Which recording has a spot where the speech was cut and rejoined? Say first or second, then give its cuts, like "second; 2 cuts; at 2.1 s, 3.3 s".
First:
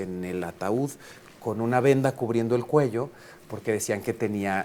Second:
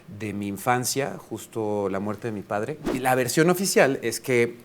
second; 1 cut; at 2.9 s